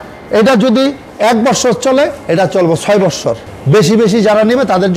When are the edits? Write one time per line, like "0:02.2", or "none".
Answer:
0:03.4